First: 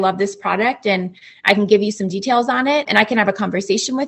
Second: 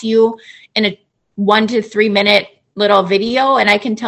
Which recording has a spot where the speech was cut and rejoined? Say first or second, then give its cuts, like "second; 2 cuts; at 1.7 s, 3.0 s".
first; 1 cut; at 2.9 s